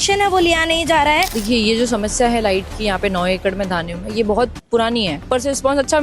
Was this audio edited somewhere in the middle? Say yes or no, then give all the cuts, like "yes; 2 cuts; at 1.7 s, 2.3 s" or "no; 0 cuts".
yes; 2 cuts; at 1.3 s, 5.2 s